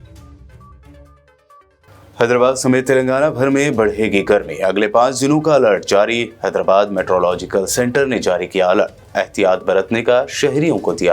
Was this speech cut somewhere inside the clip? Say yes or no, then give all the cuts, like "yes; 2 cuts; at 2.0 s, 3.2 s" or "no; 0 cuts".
yes; 1 cut; at 0.9 s